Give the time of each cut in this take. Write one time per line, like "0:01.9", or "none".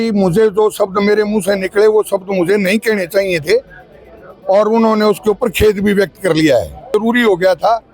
0:06.9

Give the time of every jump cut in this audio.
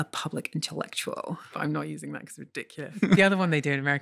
0:01.5
0:03.1

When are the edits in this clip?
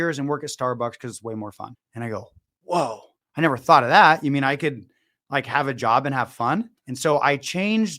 0:06.8

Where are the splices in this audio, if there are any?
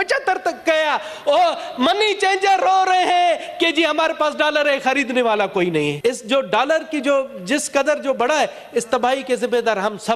0:05.9

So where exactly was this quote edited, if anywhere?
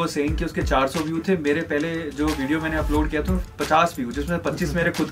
none

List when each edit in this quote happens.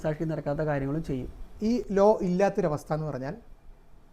0:01.4

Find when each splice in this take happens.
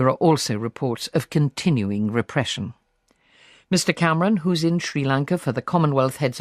0:04.4

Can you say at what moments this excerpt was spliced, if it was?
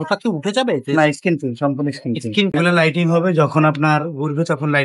0:02.5

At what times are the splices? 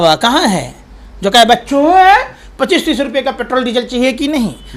none

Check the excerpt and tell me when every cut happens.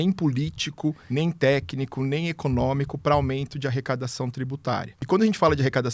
0:01.0
0:04.9

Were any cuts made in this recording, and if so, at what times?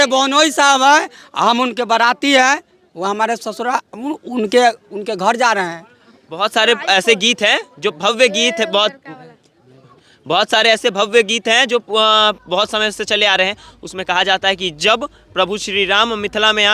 none

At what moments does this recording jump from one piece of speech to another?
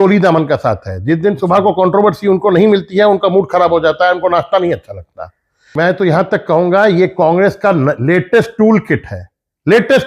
0:05.7

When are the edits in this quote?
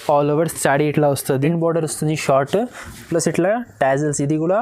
0:01.4

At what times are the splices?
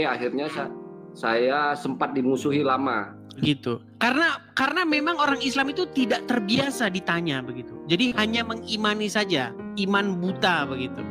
0:03.4

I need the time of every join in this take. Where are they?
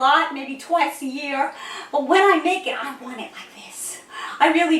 none

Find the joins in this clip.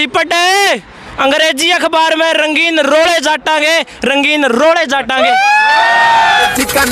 none

